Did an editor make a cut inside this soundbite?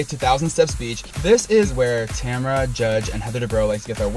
no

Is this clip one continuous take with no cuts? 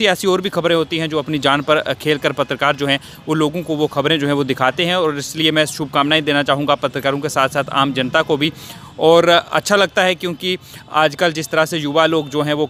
yes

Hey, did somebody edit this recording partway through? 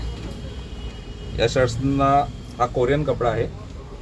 no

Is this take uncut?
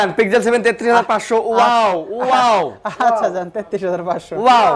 yes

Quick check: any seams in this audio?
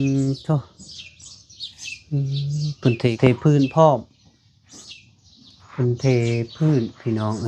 yes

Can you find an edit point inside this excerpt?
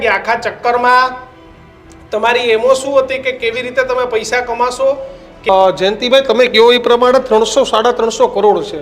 yes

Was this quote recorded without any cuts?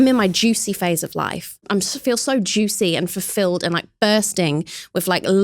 no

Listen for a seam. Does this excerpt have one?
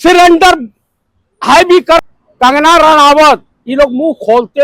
yes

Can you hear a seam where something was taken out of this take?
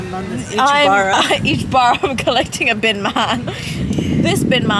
no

